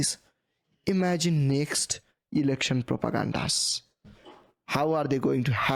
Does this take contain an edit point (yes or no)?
no